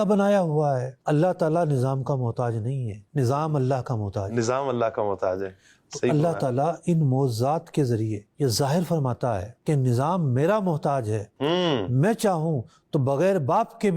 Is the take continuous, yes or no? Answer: no